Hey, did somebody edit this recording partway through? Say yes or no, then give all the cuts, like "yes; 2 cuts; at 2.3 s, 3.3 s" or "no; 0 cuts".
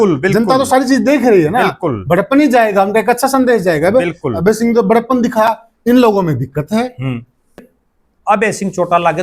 yes; 1 cut; at 7.7 s